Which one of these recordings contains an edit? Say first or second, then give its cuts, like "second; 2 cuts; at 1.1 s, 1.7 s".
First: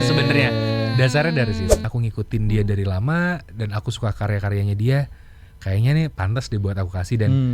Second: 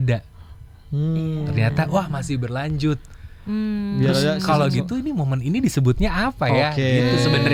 first; 1 cut; at 1.8 s